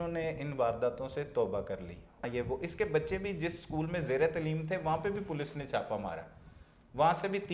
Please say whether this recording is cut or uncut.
cut